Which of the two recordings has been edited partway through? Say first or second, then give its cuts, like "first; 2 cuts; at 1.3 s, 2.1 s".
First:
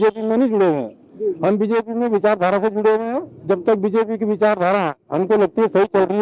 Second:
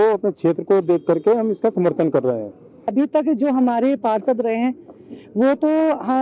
second; 1 cut; at 2.8 s